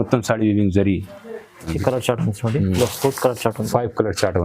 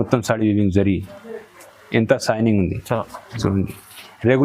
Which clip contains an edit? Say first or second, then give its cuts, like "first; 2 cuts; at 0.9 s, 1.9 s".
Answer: first; 1 cut; at 1.7 s